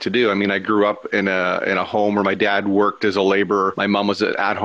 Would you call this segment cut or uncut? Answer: cut